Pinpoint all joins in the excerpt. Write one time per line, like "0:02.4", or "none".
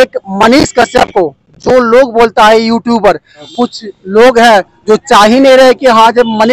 0:03.4